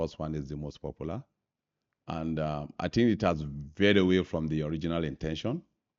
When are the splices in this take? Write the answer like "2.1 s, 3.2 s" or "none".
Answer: none